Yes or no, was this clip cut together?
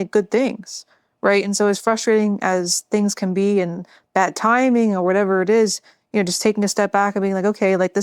no